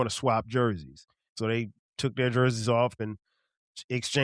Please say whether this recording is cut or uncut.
cut